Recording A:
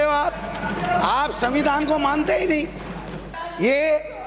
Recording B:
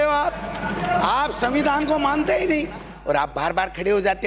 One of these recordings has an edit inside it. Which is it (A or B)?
B